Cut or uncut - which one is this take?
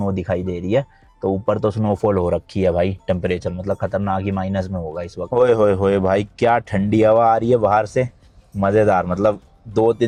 uncut